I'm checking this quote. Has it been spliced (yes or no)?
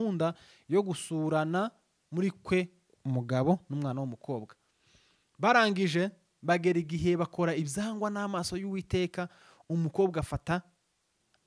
no